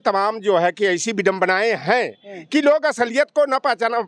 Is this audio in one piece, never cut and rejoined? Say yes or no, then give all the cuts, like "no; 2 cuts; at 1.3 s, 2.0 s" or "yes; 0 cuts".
yes; 0 cuts